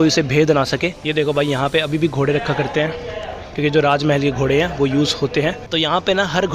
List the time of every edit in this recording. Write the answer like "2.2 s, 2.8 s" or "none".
1.0 s, 5.6 s

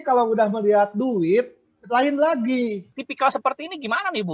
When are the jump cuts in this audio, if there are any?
3.0 s

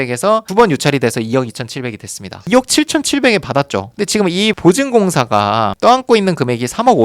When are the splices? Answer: 2.5 s

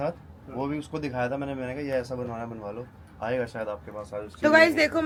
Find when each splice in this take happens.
none

